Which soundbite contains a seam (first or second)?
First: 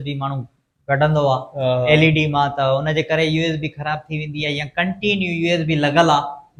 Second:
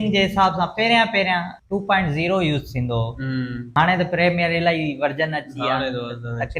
second